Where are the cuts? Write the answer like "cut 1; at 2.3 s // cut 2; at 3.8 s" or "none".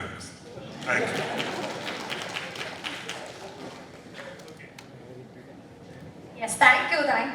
none